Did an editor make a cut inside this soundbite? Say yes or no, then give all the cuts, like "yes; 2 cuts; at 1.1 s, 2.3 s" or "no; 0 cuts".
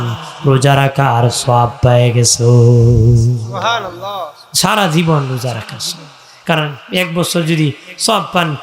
no; 0 cuts